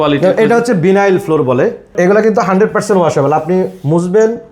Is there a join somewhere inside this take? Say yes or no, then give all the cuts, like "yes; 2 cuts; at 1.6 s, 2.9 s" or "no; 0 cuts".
yes; 1 cut; at 1.9 s